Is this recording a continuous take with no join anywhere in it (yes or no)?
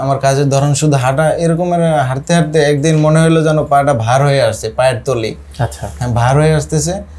yes